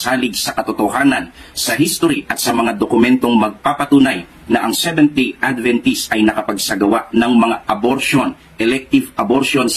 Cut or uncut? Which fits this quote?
cut